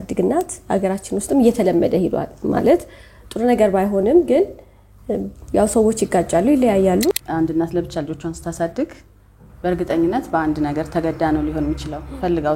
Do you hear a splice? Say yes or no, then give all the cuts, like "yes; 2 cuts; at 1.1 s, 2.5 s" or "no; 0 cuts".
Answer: yes; 1 cut; at 7.1 s